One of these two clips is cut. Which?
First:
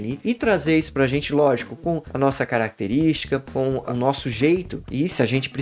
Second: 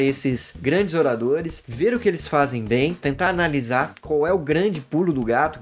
second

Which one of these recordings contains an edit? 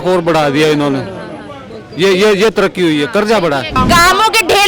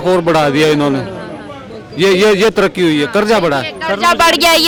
first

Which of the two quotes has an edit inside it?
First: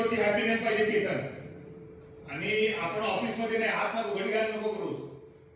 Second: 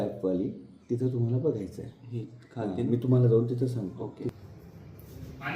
second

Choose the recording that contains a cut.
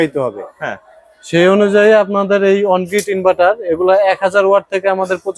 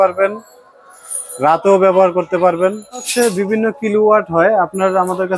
second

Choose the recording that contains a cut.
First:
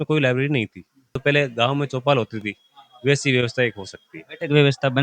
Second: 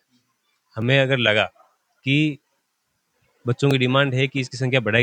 first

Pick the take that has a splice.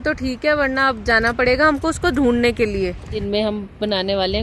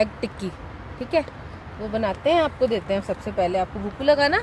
first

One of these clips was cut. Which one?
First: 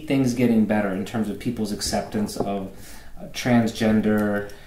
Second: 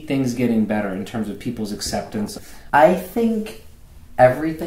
second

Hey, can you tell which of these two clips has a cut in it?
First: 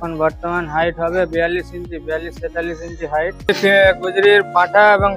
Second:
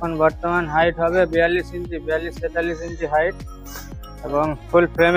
first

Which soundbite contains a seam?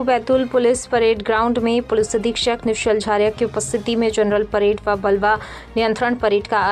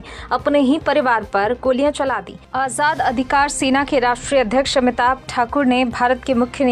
second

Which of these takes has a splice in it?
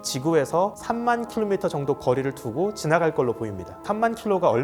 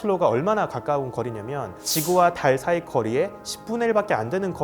second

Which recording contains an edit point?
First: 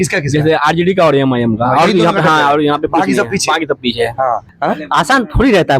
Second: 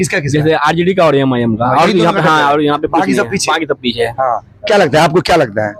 first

